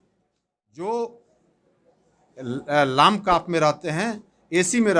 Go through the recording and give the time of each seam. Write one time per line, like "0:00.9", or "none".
none